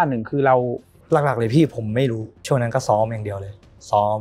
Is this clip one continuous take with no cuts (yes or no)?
no